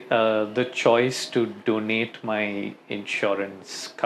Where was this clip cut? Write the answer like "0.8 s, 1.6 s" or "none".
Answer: none